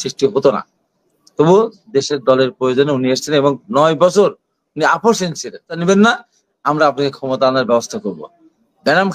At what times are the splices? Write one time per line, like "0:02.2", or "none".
0:05.8